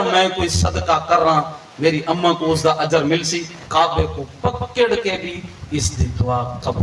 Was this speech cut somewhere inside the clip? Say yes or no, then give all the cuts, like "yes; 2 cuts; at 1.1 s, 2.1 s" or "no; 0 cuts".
yes; 1 cut; at 3.6 s